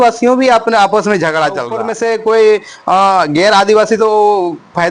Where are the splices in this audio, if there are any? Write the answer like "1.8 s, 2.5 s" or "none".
1.8 s